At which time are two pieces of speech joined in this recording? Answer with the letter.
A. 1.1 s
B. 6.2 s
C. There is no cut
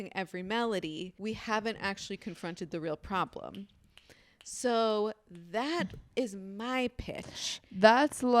A